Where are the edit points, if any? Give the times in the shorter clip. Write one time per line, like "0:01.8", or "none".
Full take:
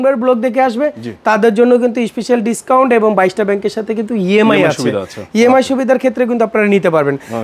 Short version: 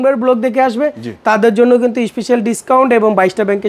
none

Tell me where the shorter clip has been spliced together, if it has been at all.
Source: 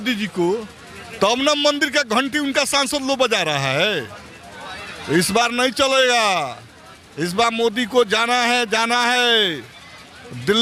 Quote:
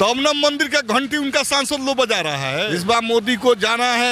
0:02.6

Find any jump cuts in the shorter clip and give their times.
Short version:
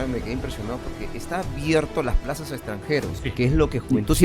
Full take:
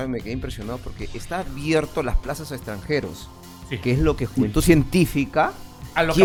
0:03.2

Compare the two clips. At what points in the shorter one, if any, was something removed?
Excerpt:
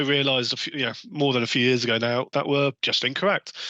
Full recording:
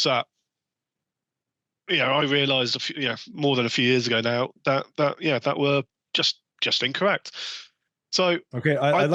0:02.3

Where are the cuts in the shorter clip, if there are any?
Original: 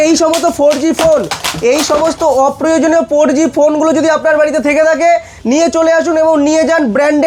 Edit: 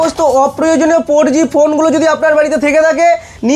none

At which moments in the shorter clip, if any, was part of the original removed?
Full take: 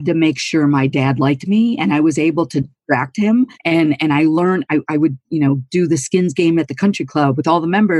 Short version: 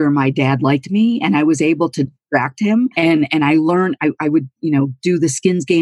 0:02.9

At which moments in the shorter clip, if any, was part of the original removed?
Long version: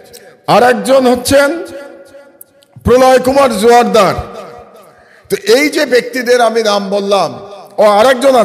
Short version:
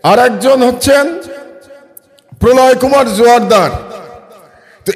none

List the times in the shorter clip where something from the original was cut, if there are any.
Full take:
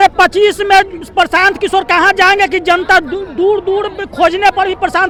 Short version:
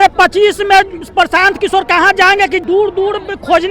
0:02.6

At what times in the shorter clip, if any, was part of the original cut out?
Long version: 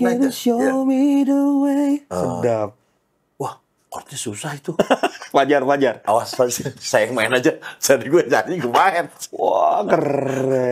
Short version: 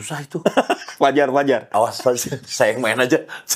none

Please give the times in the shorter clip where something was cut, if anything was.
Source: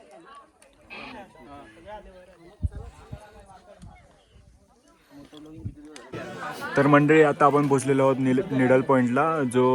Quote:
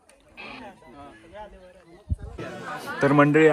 0:02.3

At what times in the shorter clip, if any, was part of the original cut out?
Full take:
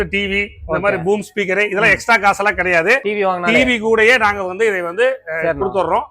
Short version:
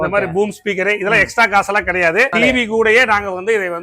0:02.3

